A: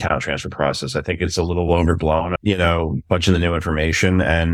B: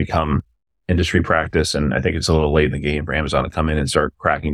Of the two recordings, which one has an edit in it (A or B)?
A